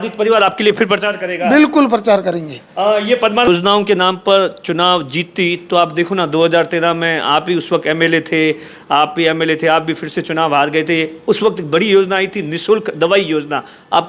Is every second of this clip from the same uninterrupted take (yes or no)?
no